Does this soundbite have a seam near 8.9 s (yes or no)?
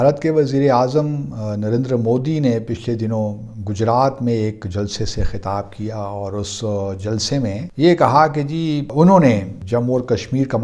yes